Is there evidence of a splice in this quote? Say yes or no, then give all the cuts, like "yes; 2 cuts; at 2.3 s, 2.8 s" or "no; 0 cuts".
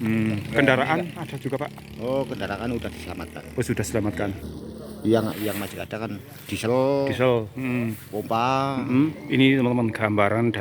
yes; 1 cut; at 9.2 s